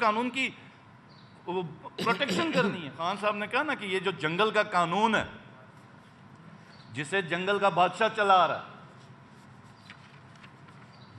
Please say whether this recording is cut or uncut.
cut